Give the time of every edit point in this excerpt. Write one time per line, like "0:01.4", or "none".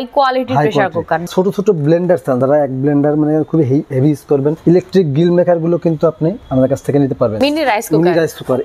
0:01.2
0:02.4
0:04.6
0:06.4
0:07.3